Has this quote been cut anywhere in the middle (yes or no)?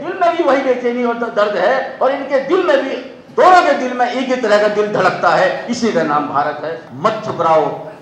yes